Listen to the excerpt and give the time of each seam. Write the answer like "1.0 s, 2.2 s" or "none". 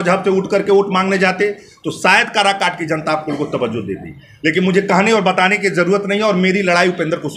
none